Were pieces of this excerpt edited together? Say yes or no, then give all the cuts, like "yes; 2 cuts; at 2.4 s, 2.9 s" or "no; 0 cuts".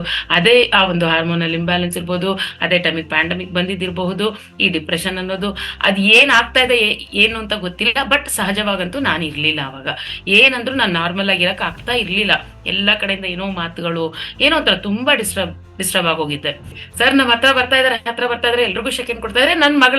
yes; 1 cut; at 16.8 s